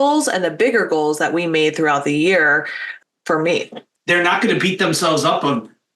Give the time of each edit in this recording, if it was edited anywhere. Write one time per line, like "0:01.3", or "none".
0:03.9